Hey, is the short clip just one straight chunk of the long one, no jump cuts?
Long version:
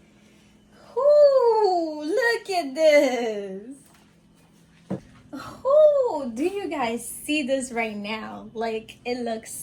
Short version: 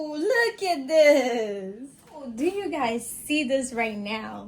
no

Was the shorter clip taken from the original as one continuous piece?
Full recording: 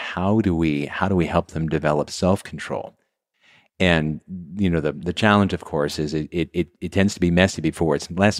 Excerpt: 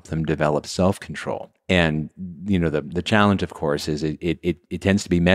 no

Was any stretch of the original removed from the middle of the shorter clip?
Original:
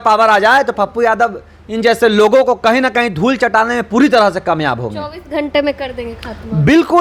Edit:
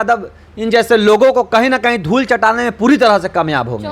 no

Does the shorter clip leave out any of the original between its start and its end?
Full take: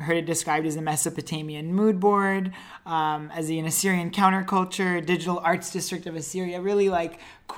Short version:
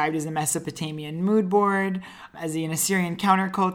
yes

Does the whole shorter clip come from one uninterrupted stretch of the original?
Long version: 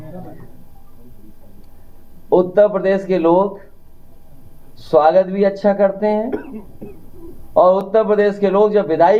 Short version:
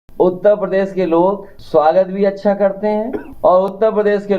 no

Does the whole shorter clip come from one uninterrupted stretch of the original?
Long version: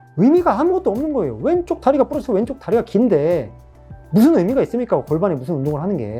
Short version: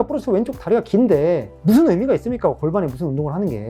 no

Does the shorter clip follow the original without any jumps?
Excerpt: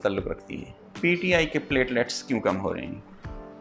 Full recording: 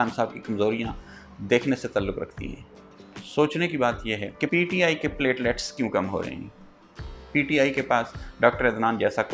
no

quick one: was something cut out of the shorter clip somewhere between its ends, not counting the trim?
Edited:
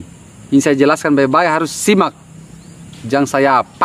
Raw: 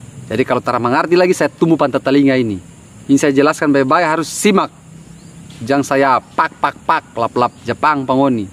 no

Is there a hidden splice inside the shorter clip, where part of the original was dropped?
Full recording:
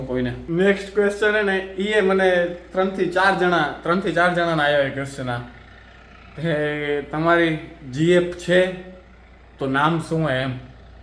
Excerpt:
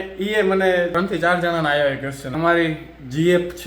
yes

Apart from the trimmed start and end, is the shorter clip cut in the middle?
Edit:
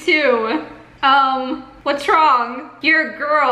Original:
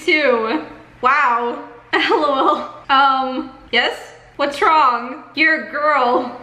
yes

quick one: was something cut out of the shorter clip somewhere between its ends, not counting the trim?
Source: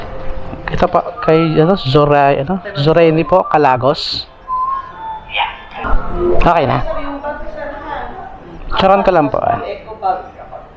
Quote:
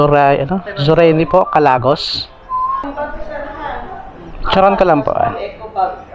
yes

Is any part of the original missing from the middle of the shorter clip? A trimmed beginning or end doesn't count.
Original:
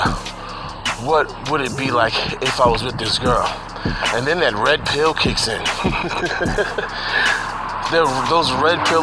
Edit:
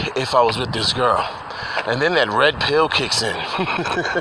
no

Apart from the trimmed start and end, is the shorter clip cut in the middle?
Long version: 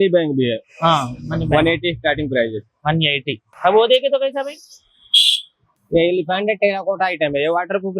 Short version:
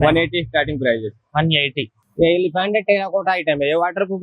yes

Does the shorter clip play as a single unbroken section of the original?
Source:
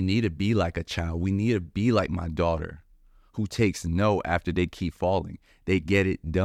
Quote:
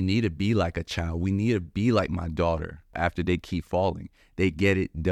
no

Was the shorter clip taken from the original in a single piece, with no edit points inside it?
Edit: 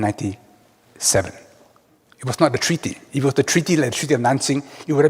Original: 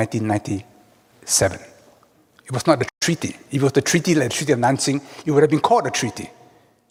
no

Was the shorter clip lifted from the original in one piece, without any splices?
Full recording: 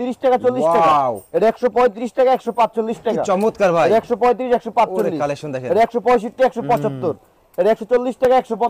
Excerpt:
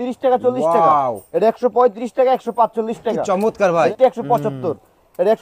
no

